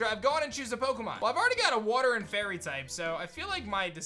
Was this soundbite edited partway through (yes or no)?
yes